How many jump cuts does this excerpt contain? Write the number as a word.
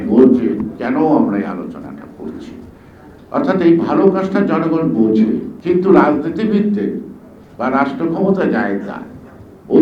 one